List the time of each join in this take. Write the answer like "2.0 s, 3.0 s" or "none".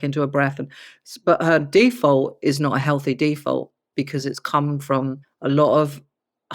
5.3 s